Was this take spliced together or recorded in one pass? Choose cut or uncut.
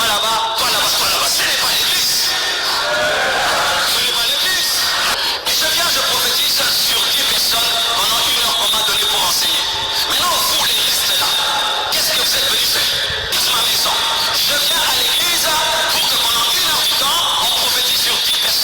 cut